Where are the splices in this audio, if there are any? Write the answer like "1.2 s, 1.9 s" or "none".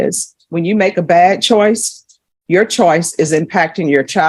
none

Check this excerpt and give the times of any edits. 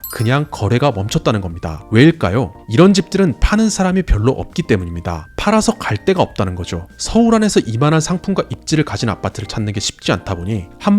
none

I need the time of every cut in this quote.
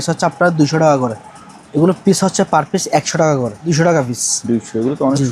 1.3 s, 3.6 s

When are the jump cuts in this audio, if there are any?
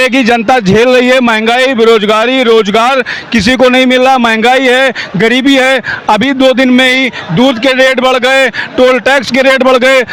none

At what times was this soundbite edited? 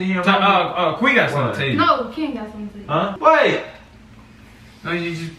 3.2 s

